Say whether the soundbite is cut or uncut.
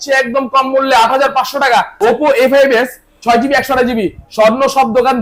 cut